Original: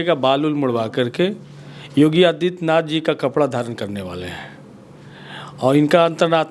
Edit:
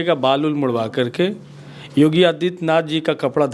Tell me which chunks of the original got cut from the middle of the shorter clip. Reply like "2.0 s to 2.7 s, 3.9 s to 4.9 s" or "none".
none